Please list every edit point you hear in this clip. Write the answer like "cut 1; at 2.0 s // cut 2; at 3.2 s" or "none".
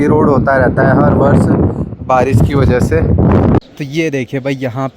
cut 1; at 3.6 s